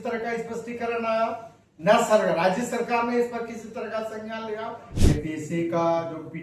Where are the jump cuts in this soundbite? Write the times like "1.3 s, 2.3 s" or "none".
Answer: 4.9 s

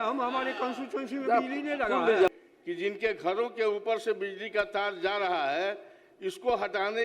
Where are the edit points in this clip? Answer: 2.3 s

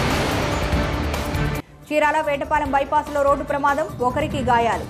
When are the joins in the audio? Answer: 1.3 s

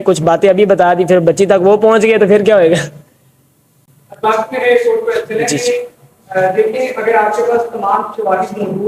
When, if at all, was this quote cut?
none

